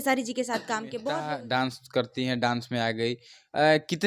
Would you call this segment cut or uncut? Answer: cut